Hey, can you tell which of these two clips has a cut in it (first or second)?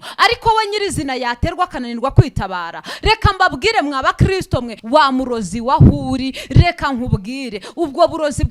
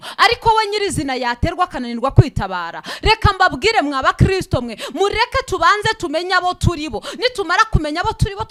first